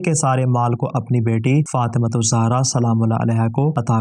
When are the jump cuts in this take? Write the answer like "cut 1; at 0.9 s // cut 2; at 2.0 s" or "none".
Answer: none